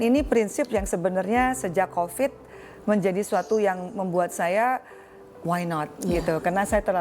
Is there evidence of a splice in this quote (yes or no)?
no